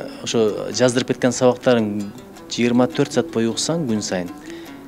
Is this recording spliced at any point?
no; 0 cuts

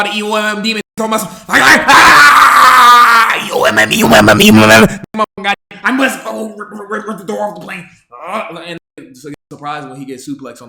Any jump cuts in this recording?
no; 0 cuts

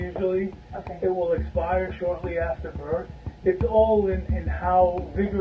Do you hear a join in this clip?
yes; 1 cut; at 3.2 s

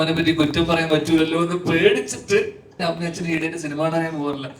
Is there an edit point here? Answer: yes; 1 cut; at 2.7 s

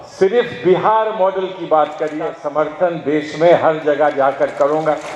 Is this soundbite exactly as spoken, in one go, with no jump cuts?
no; 1 cut; at 2.2 s

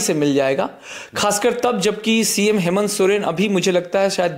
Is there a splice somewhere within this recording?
no; 0 cuts

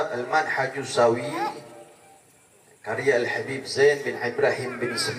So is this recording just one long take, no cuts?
yes; 0 cuts

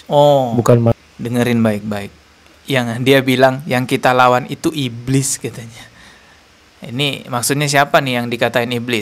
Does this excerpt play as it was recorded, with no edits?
yes; 0 cuts

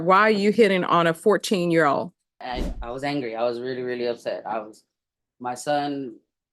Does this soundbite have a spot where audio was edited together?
yes; 1 cut; at 2.4 s

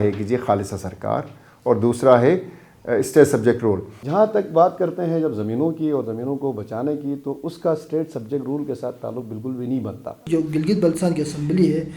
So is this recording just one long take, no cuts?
no; 2 cuts; at 3.9 s, 10.2 s

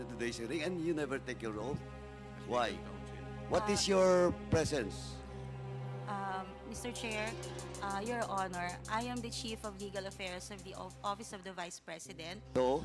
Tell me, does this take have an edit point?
no; 0 cuts

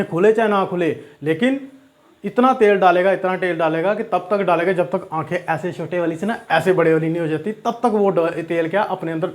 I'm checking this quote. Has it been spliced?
no; 0 cuts

